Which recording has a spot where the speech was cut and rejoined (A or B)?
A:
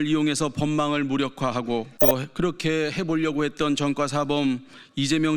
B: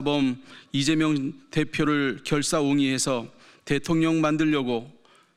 A